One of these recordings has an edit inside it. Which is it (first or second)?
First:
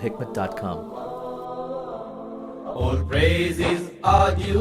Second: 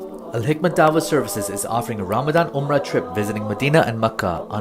first